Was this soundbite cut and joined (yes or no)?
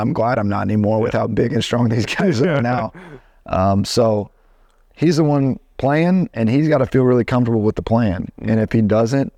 no